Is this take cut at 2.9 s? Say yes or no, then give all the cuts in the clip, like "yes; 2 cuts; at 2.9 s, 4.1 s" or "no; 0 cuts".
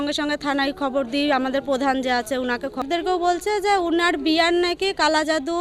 yes; 1 cut; at 2.9 s